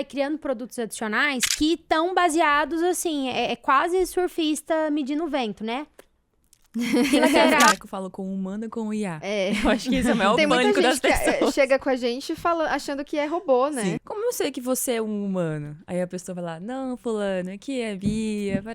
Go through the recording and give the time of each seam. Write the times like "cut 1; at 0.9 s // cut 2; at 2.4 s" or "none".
cut 1; at 1.4 s // cut 2; at 7.7 s // cut 3; at 14.1 s